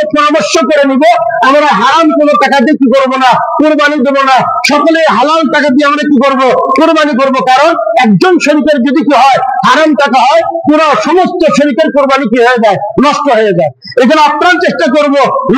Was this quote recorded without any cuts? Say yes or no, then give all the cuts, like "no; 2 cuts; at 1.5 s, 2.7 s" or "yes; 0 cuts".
yes; 0 cuts